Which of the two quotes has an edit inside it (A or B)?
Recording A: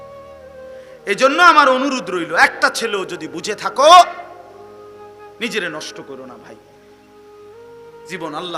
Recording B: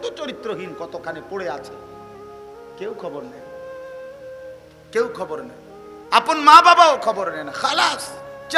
A